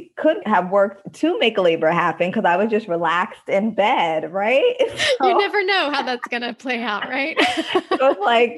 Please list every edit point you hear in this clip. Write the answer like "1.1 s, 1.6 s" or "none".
none